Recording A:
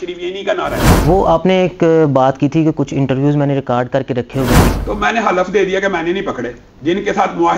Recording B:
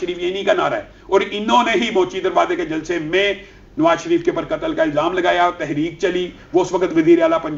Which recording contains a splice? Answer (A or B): A